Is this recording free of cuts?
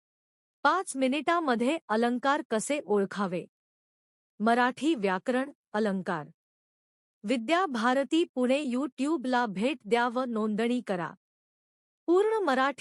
yes; 0 cuts

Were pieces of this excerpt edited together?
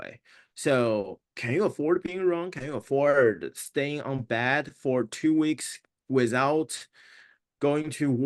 no; 0 cuts

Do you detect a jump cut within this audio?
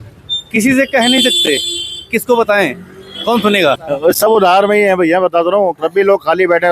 yes; 1 cut; at 3.8 s

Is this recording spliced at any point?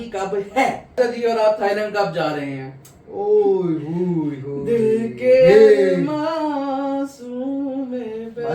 yes; 1 cut; at 1.0 s

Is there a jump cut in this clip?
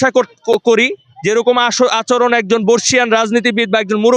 no; 0 cuts

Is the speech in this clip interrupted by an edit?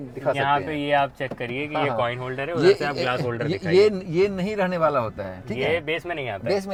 no; 0 cuts

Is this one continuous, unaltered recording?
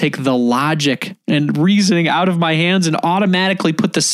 no; 1 cut; at 1.1 s

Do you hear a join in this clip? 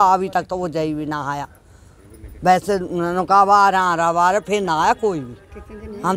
no; 0 cuts

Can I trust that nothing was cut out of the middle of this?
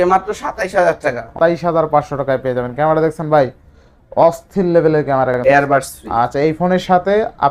no; 2 cuts; at 1.4 s, 5.4 s

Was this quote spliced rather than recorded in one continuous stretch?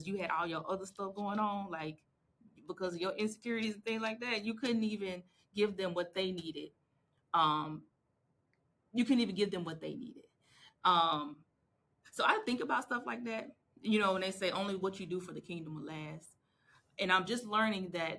no; 0 cuts

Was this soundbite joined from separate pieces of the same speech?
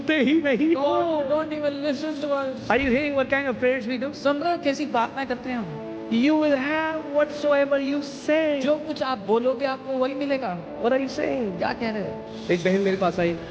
yes; 1 cut; at 12.3 s

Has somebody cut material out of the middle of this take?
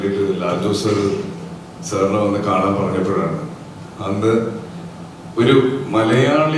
no; 0 cuts

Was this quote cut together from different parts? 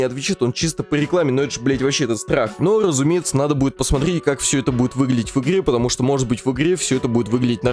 no; 0 cuts

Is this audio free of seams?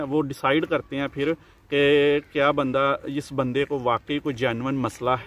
yes; 0 cuts

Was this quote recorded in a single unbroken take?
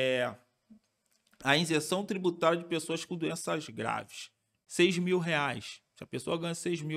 no; 1 cut; at 4.6 s

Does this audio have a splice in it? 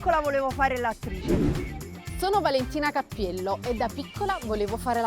yes; 2 cuts; at 1.1 s, 2.0 s

